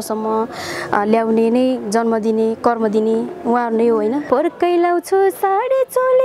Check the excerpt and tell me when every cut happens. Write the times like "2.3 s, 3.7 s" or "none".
4.2 s